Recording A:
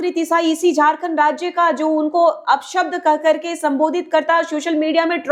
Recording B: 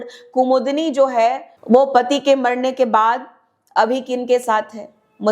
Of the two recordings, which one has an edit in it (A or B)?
B